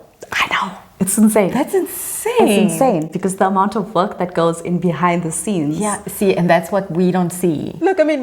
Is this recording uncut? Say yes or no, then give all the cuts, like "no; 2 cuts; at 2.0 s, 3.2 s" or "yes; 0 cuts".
yes; 0 cuts